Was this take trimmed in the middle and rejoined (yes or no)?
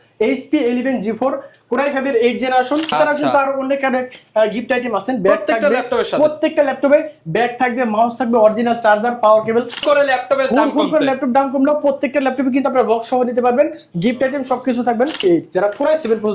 yes